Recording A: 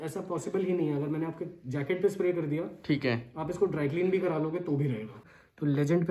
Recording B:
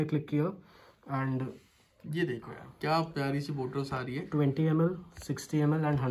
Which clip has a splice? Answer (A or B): A